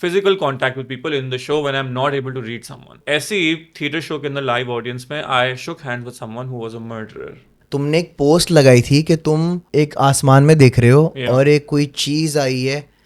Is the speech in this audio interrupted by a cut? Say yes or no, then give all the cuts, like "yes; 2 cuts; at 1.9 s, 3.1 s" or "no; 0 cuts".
yes; 3 cuts; at 3.0 s, 7.5 s, 9.6 s